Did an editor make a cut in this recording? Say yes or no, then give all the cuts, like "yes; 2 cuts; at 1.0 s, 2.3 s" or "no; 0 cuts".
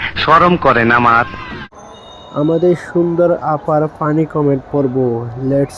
no; 0 cuts